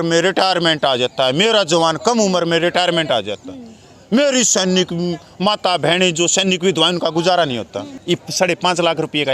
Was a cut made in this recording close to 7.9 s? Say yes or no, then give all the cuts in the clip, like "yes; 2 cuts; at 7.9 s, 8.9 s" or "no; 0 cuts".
yes; 1 cut; at 7.9 s